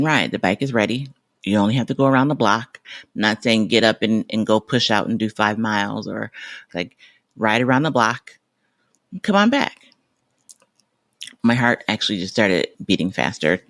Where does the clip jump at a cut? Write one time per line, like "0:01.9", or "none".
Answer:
0:02.9
0:06.7
0:12.7